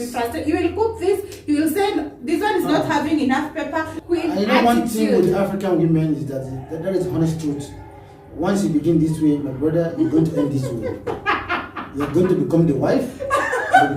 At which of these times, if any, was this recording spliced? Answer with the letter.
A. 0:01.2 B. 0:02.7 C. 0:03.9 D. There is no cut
C